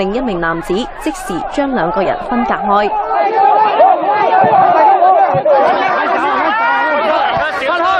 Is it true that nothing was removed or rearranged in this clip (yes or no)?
no